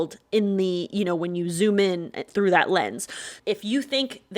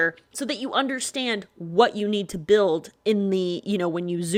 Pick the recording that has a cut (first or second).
first